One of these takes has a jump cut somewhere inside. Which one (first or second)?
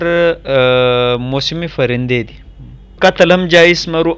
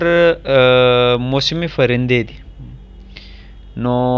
first